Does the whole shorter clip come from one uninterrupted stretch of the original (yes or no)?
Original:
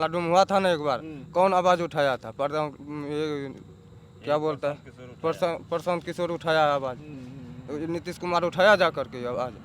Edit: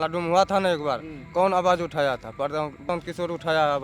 no